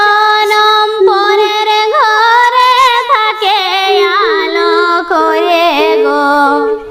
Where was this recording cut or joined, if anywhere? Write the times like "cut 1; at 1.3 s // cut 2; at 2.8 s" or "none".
none